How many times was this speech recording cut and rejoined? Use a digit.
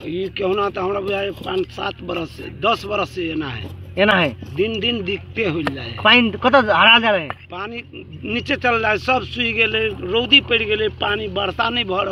0